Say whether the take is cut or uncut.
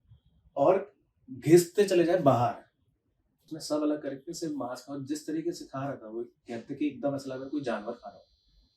cut